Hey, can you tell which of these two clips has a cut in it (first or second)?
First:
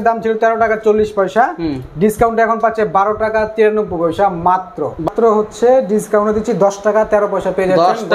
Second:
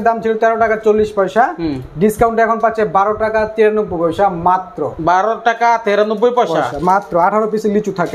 first